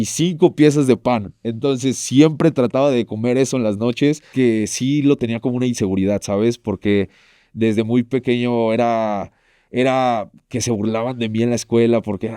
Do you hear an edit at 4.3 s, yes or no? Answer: yes